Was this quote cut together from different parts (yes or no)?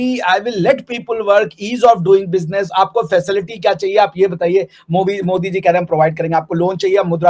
no